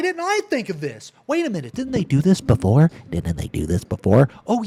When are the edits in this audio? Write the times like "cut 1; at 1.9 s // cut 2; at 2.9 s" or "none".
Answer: none

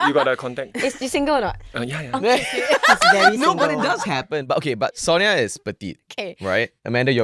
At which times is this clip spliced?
none

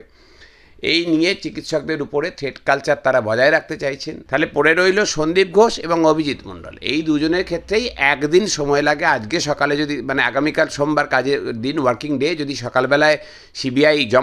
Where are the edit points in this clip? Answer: cut 1; at 4.1 s

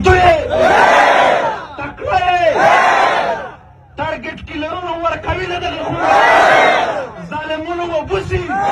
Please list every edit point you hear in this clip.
none

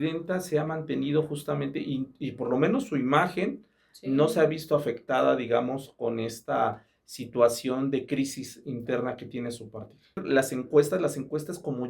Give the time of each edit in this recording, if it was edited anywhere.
cut 1; at 10.2 s

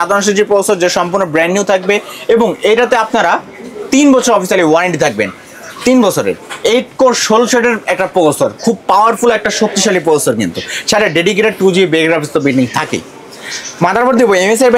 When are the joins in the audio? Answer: none

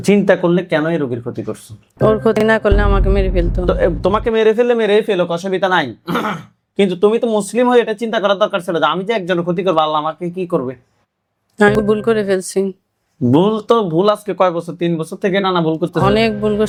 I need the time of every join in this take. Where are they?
none

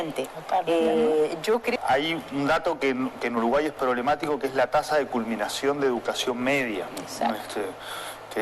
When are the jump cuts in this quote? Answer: cut 1; at 1.7 s

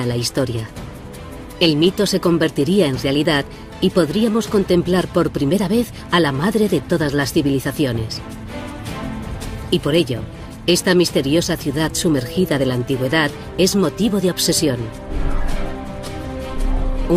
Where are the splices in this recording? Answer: cut 1; at 11.3 s

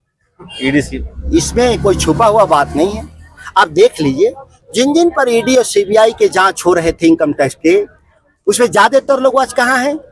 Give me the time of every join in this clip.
none

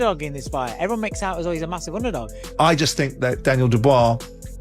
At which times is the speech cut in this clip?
cut 1; at 2.4 s

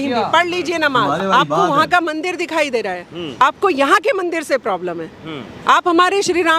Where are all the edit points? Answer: cut 1; at 1.2 s

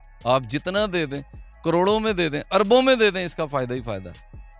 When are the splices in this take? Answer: none

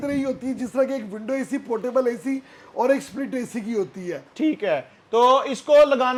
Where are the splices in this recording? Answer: none

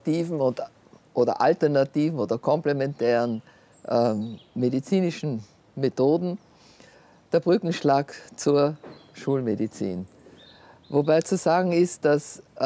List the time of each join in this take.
none

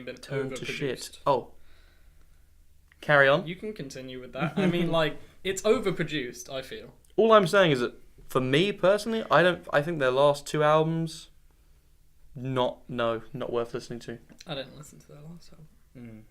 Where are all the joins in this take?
cut 1; at 9.2 s

